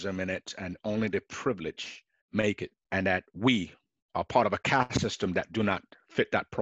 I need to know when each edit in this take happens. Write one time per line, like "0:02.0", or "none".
0:02.7